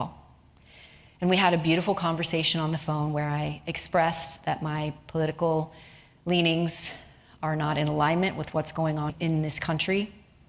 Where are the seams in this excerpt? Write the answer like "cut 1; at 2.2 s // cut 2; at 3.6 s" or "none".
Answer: cut 1; at 9.1 s